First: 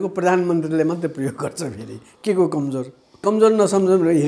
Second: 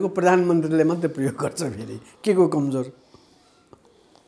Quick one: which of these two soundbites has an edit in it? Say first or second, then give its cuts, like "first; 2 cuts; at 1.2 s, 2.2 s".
first; 1 cut; at 3.2 s